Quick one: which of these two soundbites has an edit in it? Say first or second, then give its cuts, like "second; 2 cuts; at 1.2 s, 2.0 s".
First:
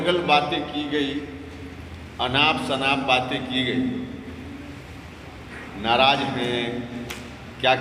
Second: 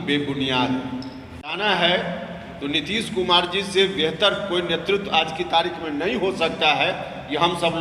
second; 1 cut; at 1.5 s